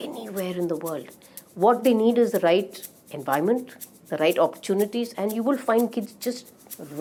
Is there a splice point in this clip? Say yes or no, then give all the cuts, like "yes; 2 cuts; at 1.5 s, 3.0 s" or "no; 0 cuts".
no; 0 cuts